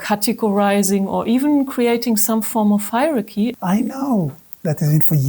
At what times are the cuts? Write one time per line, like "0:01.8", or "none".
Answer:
0:03.6